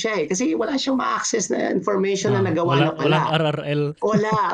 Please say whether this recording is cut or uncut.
uncut